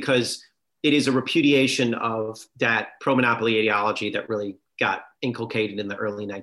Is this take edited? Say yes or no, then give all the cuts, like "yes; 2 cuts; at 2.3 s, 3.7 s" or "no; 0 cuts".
yes; 1 cut; at 5.1 s